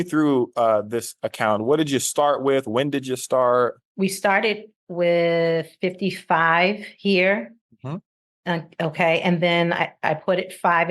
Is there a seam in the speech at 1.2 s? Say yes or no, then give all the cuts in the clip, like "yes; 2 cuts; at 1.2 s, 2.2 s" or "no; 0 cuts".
no; 1 cut; at 3.8 s